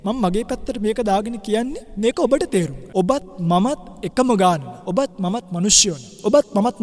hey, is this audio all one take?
no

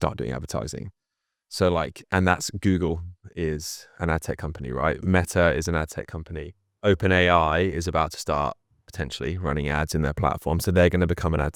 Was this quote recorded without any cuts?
yes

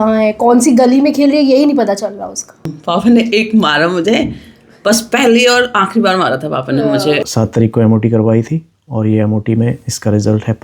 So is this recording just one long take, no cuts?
no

